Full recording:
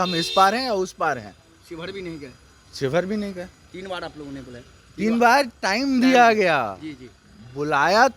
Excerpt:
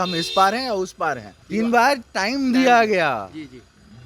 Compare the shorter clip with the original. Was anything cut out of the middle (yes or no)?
yes